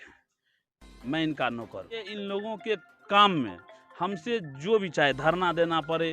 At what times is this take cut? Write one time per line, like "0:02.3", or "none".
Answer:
0:02.1
0:02.9